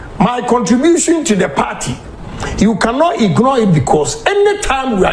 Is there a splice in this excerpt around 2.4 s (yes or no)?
no